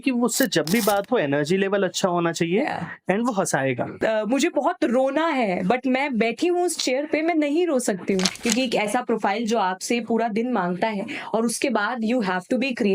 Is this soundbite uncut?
no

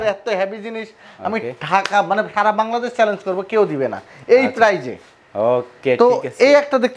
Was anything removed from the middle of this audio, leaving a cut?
no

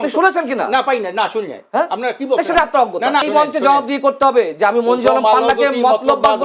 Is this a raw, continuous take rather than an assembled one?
no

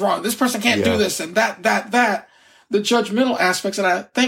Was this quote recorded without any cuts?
yes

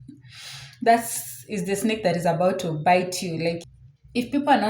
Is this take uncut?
no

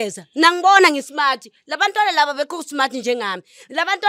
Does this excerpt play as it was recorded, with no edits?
yes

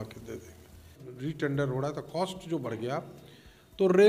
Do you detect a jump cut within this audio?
yes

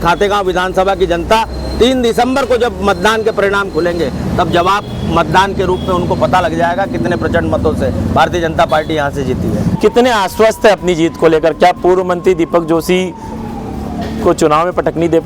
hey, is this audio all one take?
no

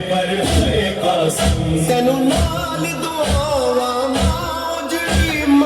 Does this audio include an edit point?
no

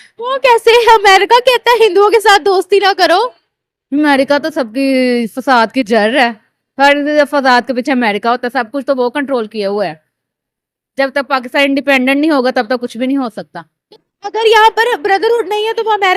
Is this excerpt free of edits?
yes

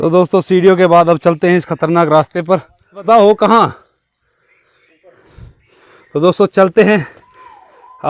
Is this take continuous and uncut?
no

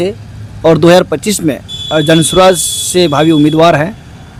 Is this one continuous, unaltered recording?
yes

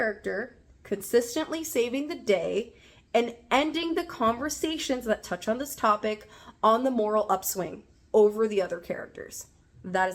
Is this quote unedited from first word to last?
yes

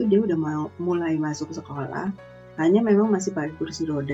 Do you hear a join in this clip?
no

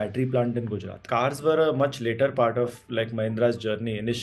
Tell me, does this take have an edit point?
yes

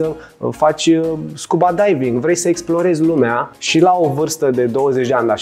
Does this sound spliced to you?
yes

